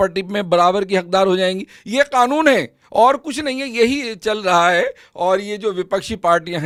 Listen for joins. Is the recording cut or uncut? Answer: uncut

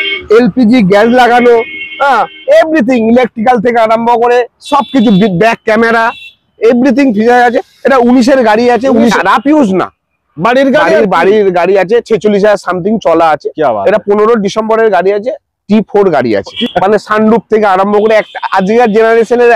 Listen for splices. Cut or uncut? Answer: cut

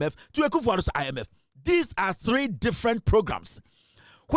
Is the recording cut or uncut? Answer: uncut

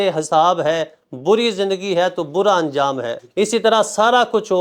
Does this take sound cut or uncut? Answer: cut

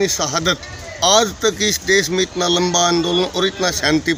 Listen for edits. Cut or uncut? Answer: uncut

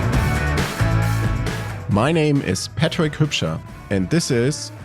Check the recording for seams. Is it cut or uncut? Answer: cut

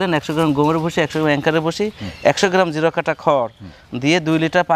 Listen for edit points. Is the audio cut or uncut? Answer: uncut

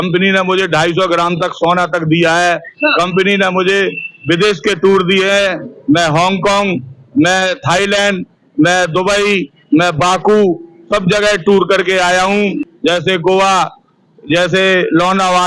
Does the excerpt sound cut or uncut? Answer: cut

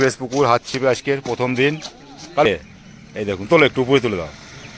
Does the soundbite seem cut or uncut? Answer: cut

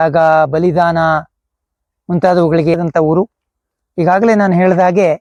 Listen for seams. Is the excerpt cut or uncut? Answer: uncut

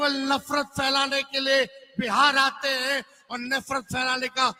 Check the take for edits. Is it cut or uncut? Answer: uncut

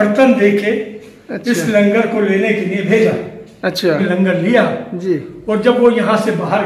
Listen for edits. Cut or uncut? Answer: cut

